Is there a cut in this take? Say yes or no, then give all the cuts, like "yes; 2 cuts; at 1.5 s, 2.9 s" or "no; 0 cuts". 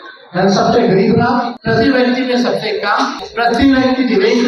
yes; 2 cuts; at 1.6 s, 3.2 s